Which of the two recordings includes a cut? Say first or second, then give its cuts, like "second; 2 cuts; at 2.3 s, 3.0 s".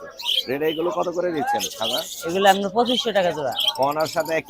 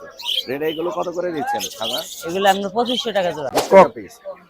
second; 1 cut; at 3.5 s